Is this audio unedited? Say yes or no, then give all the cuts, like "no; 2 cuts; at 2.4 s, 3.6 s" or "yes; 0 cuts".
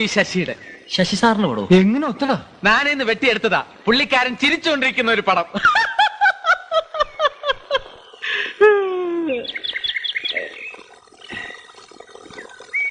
yes; 0 cuts